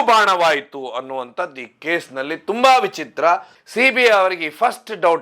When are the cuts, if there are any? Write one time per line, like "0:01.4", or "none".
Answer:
0:03.6